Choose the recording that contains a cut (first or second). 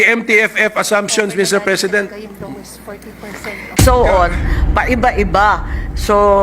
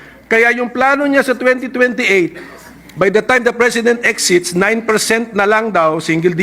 first